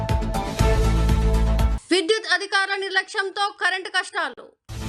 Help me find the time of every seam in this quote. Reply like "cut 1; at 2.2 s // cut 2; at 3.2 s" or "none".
none

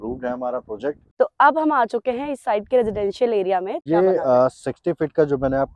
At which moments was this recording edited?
cut 1; at 1.1 s // cut 2; at 3.8 s

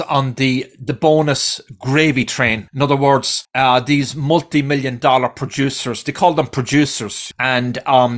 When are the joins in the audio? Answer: cut 1; at 2.6 s // cut 2; at 3.4 s

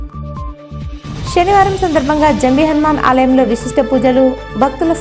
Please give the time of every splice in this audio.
cut 1; at 1.1 s

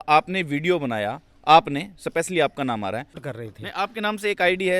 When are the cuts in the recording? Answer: cut 1; at 3.2 s

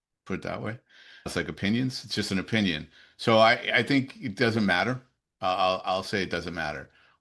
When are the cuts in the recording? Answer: none

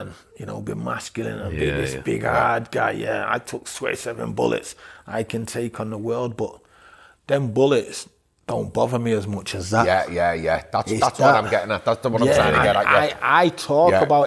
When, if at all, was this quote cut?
none

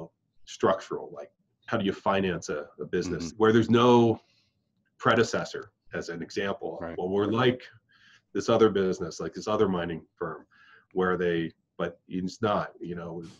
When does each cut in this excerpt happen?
cut 1; at 1.6 s // cut 2; at 3.3 s

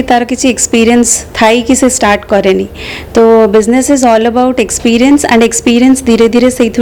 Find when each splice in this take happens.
none

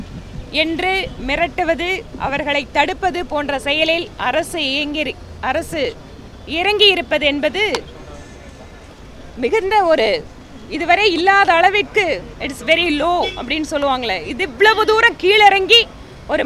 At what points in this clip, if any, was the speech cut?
none

